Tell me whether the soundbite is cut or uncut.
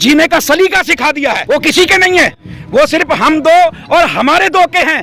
cut